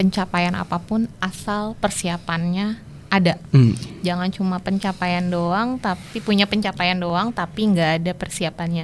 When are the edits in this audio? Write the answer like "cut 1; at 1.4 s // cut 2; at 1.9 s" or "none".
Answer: none